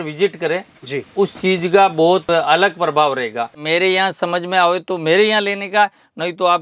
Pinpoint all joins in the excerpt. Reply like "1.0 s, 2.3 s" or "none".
2.2 s, 3.6 s